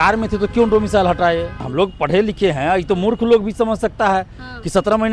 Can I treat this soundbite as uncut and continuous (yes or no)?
no